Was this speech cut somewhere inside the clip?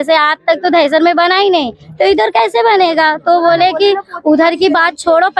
no; 0 cuts

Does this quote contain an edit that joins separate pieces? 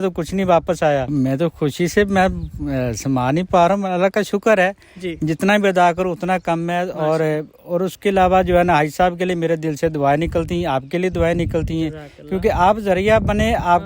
yes; 1 cut; at 1.1 s

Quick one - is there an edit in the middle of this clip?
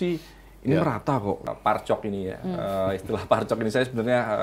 yes; 1 cut; at 1.5 s

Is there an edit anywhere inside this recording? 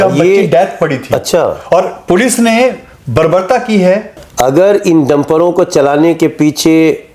yes; 1 cut; at 4.2 s

